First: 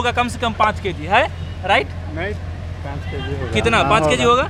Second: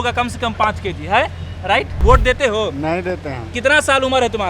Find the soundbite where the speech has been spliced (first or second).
second